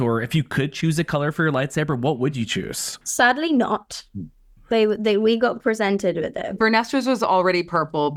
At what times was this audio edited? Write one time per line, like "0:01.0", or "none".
none